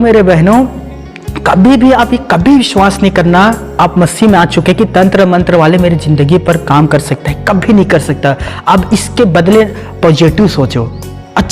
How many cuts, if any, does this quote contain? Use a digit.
0